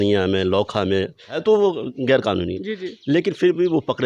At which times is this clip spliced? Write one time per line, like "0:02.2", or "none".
0:01.4